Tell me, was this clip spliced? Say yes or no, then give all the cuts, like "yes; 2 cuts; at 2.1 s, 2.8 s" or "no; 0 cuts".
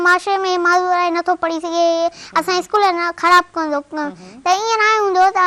no; 0 cuts